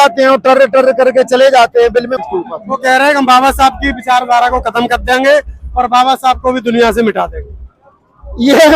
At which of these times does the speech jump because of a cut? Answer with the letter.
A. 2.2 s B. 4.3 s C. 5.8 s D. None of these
A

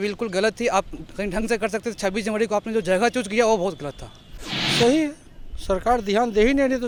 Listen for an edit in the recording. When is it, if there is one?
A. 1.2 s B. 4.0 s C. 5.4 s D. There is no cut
D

